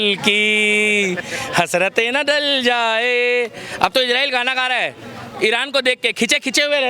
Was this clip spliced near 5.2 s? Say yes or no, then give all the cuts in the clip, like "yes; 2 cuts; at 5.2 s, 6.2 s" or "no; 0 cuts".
no; 0 cuts